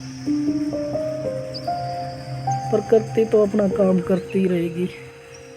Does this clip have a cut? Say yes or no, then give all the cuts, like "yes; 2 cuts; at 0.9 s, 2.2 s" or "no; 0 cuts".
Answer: yes; 1 cut; at 2.7 s